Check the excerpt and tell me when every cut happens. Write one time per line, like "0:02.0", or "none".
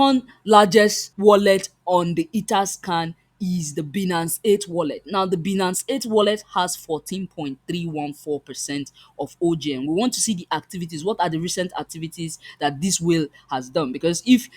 0:01.1